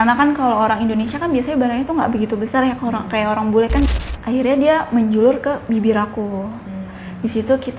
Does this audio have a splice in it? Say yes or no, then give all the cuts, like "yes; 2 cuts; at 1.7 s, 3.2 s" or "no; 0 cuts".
yes; 1 cut; at 3.9 s